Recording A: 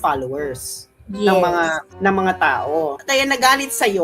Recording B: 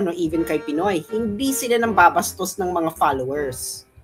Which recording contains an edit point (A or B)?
A